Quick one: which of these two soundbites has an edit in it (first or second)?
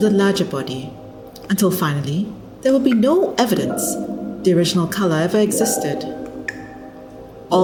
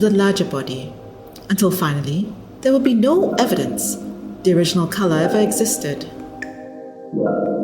second